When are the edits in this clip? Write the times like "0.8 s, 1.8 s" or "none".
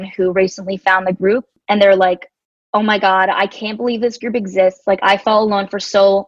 1.5 s